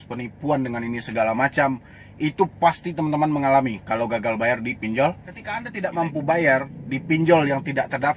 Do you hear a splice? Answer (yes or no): yes